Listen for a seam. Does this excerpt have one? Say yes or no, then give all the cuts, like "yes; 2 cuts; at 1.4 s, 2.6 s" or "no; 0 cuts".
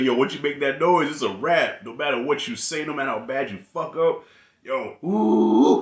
no; 0 cuts